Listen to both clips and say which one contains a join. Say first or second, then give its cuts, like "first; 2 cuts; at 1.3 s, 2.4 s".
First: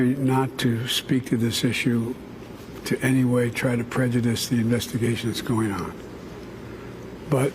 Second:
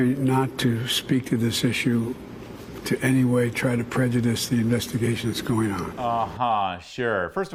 first; 1 cut; at 5.9 s